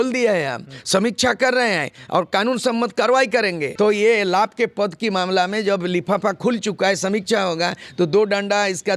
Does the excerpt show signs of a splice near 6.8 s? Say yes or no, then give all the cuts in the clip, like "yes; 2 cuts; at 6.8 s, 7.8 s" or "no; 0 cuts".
no; 1 cut; at 3.6 s